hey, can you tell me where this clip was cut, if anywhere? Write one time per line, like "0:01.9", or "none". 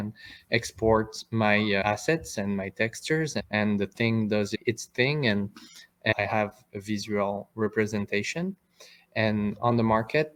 none